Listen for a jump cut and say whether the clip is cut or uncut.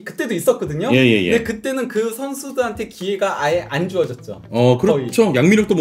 uncut